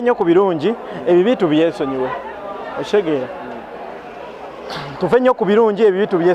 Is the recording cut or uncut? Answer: uncut